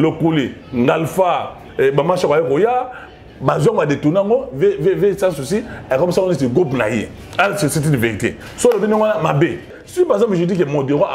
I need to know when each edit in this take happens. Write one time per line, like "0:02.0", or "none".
0:09.8